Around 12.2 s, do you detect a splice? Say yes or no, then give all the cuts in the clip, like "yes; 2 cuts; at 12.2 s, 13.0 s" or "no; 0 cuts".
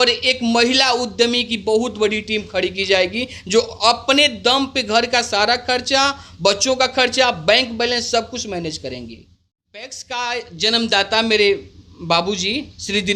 no; 1 cut; at 10.0 s